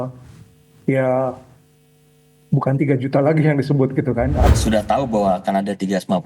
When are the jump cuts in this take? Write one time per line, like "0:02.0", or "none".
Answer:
0:04.5